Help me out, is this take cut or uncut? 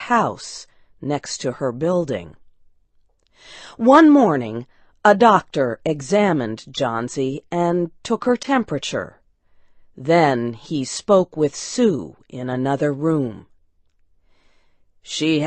uncut